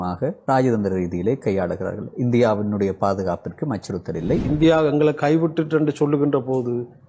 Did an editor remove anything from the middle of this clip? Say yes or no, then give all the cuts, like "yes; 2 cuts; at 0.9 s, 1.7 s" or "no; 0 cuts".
yes; 1 cut; at 4.4 s